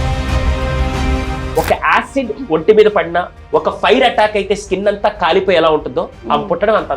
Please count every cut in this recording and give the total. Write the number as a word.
one